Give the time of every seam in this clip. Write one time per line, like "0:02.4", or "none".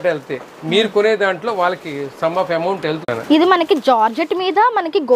0:03.1